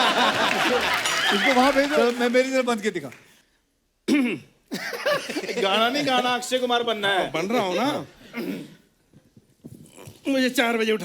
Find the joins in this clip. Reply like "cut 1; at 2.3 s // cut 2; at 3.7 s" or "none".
cut 1; at 2.0 s